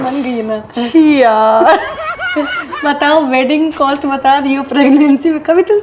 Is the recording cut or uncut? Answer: uncut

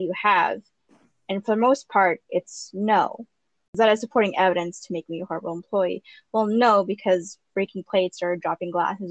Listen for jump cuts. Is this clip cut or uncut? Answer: cut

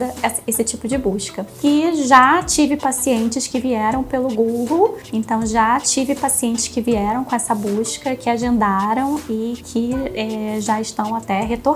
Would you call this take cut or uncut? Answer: cut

